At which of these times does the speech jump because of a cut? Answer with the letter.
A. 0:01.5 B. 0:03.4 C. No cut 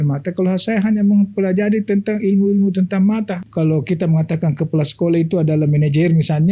B